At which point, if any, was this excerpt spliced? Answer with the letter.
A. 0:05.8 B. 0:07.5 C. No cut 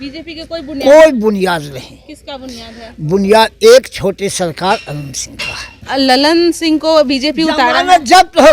A